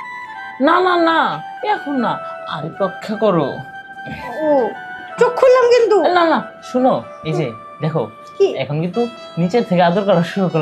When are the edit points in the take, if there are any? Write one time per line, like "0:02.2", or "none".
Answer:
none